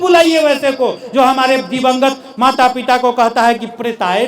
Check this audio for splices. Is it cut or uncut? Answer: uncut